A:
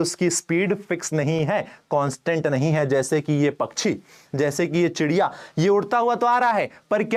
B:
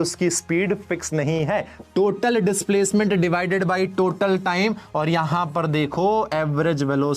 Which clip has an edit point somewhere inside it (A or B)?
B